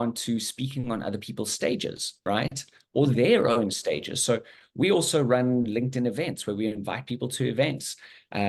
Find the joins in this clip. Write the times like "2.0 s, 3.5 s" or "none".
2.1 s